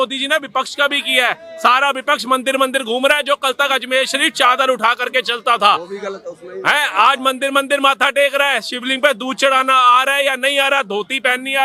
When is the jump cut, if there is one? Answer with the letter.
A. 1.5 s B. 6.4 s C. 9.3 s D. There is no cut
D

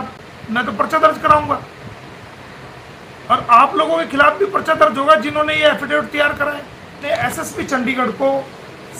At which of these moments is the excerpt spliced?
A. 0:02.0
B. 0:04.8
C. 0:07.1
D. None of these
C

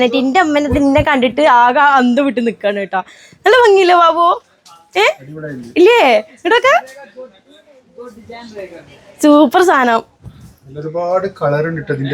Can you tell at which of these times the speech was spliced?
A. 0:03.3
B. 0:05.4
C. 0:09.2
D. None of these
D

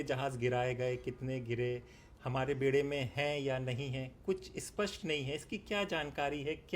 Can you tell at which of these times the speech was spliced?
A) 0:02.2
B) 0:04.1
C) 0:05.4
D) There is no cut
D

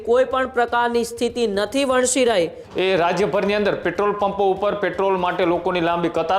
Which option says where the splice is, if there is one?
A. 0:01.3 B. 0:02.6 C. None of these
B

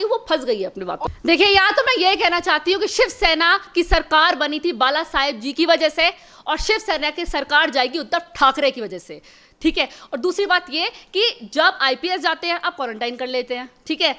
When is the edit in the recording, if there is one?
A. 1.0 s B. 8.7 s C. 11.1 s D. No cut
A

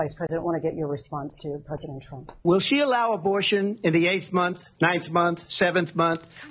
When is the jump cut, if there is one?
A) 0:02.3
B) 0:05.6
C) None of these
A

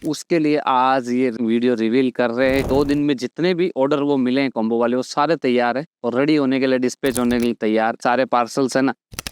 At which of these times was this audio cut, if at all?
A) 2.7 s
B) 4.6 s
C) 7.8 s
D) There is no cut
A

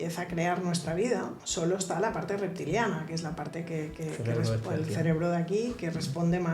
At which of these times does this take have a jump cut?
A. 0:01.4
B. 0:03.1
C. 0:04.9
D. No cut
A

